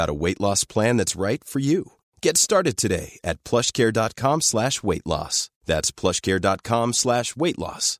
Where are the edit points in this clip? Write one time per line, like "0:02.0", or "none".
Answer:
none